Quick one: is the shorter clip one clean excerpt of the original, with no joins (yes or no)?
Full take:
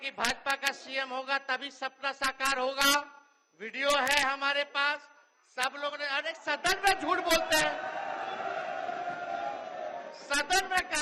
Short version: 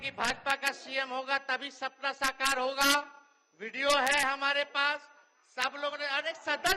yes